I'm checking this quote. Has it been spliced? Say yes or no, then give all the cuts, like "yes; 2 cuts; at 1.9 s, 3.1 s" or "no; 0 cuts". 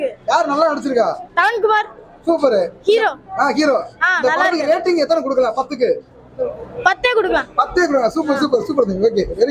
no; 0 cuts